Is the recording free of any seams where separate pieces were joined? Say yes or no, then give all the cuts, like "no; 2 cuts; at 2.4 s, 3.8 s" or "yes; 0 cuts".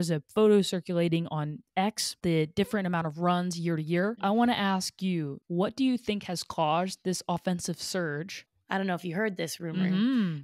no; 3 cuts; at 2.2 s, 4.2 s, 8.4 s